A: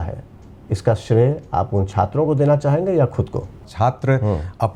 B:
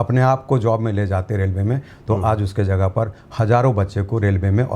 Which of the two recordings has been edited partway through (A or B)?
A